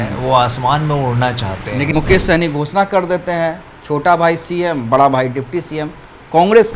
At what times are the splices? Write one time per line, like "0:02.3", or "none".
0:01.9